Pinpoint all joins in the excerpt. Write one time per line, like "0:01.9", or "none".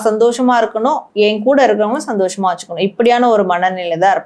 0:01.1